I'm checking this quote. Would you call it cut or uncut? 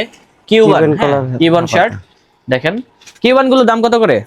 uncut